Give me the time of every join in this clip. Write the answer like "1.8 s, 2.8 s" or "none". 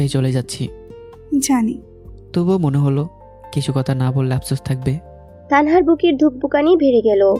none

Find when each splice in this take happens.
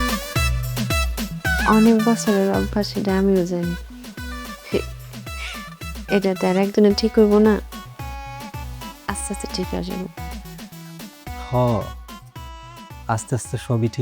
1.0 s

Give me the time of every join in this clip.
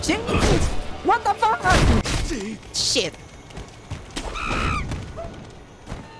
2.0 s

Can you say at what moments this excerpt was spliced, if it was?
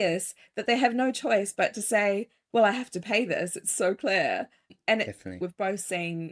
5.4 s

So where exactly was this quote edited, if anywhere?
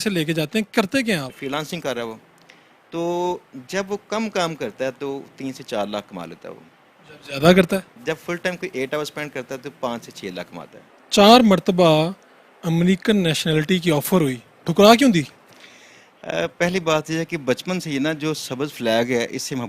1.4 s, 10.9 s

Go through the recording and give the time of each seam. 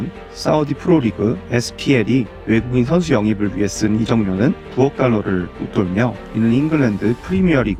none

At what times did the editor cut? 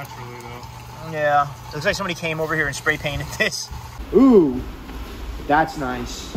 3.9 s

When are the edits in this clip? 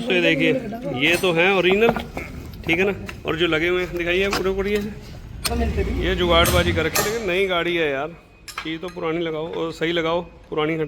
5.3 s

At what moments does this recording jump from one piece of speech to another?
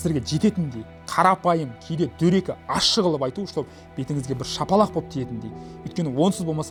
none

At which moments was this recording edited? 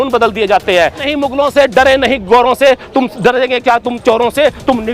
1.0 s

